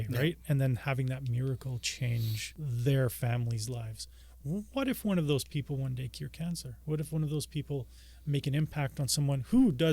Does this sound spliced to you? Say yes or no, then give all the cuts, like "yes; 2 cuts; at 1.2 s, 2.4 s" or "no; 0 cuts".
yes; 1 cut; at 2.4 s